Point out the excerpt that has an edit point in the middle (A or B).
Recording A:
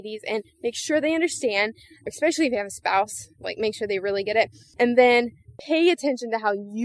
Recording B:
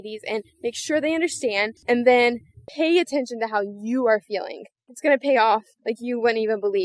B